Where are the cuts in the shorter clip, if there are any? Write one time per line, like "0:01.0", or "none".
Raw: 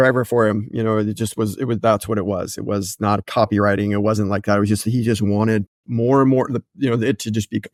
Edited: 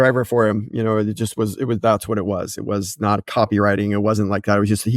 none